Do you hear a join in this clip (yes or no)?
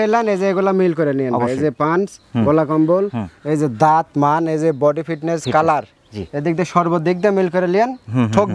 no